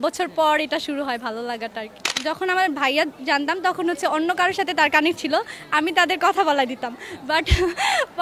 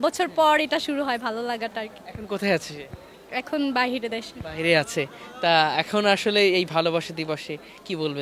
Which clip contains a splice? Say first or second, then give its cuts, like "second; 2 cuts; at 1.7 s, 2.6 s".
first; 1 cut; at 2.1 s